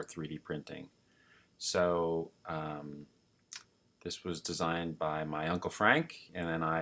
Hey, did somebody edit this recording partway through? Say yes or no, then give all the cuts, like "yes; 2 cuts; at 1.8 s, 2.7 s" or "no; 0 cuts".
yes; 1 cut; at 5.5 s